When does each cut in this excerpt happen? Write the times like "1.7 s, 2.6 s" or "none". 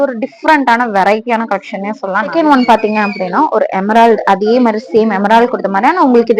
2.3 s

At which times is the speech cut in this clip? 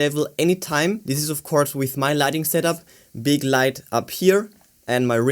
none

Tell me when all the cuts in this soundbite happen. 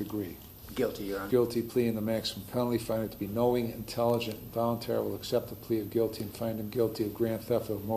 1.2 s

